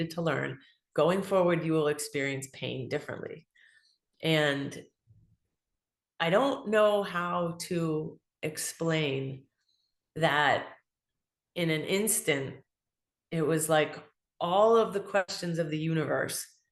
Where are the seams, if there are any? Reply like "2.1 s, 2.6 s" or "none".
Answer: 15.4 s